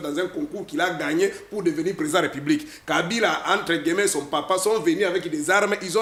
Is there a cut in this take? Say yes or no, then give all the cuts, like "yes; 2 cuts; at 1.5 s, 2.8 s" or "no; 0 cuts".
no; 0 cuts